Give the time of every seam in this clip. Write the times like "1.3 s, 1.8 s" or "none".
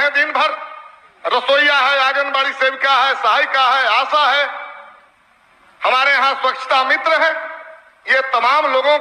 none